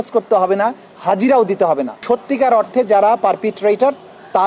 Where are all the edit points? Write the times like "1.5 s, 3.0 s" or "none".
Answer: 2.0 s